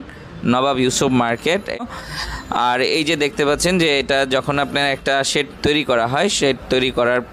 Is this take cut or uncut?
cut